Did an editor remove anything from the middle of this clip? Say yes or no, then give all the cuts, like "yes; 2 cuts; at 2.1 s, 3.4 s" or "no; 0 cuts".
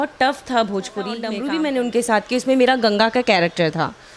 yes; 1 cut; at 1.3 s